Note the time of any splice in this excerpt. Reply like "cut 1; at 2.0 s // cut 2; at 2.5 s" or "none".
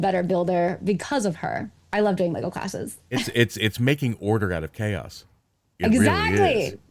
cut 1; at 1.8 s